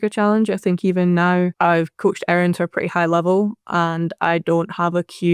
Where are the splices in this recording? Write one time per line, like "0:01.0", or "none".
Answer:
0:01.5